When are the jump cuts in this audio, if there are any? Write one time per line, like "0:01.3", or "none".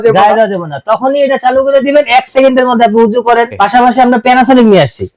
0:03.5